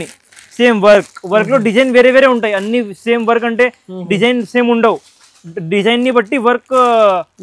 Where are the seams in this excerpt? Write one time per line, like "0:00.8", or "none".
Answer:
none